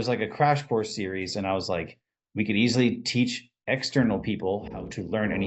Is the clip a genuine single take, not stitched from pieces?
yes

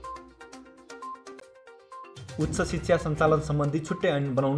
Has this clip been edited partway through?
yes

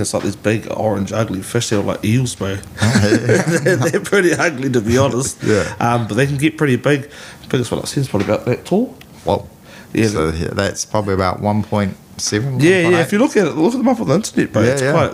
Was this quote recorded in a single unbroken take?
yes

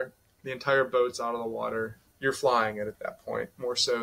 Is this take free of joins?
no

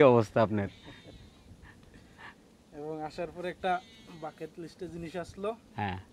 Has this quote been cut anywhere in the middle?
no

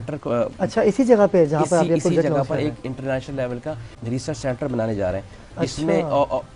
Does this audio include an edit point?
yes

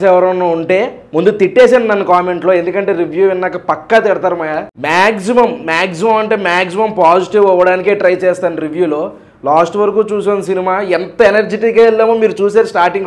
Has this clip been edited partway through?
no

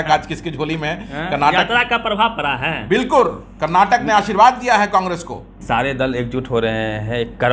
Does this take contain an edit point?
yes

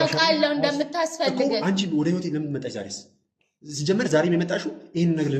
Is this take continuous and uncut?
yes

